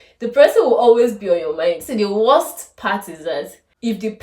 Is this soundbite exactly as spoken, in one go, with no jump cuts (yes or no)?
no